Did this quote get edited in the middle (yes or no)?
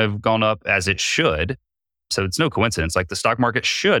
yes